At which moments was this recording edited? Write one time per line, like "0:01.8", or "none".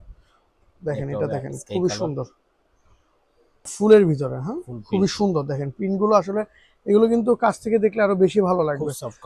0:03.7